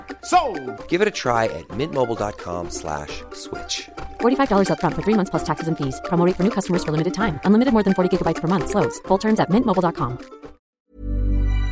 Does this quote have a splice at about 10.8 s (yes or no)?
yes